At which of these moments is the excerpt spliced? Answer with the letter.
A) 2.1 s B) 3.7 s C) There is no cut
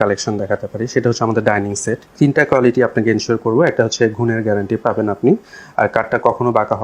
A